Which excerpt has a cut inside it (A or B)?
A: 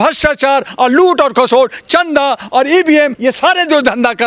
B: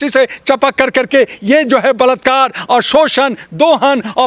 A